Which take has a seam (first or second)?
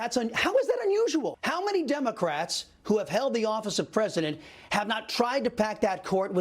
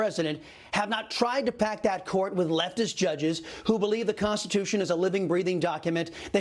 first